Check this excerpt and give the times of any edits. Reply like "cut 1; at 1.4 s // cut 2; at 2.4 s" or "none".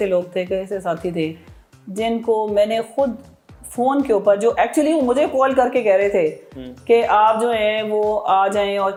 none